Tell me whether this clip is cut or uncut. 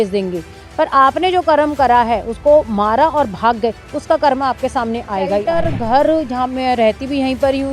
cut